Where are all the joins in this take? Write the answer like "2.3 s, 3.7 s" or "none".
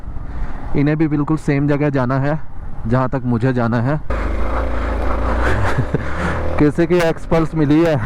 4.1 s